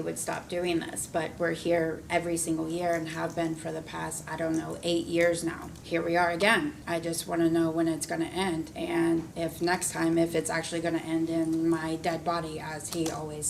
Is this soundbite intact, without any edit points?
no; 4 cuts; at 5.7 s, 6.8 s, 8.7 s, 9.3 s

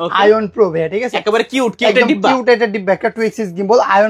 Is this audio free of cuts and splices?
yes; 0 cuts

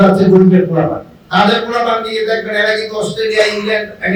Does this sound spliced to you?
no; 0 cuts

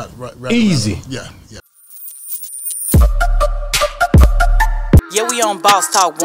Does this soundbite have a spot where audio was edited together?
yes; 1 cut; at 1.6 s

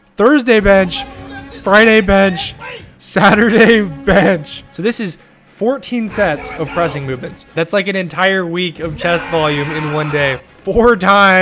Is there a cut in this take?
yes; 3 cuts; at 4.6 s, 7.5 s, 10.5 s

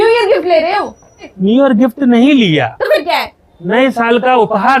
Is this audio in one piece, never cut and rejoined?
no; 1 cut; at 1.3 s

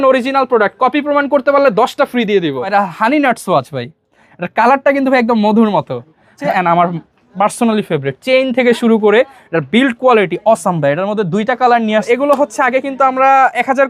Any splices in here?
yes; 3 cuts; at 2.7 s, 6.4 s, 12.0 s

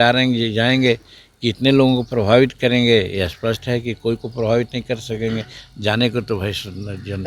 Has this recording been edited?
no; 0 cuts

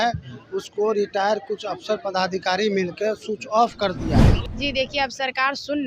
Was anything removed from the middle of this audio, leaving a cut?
yes; 1 cut; at 4.4 s

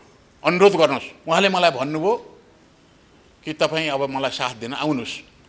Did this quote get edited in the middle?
yes; 1 cut; at 1.1 s

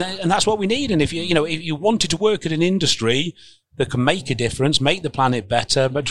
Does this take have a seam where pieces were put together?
no; 0 cuts

